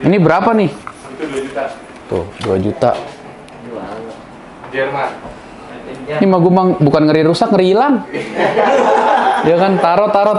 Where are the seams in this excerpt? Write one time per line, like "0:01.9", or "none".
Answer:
none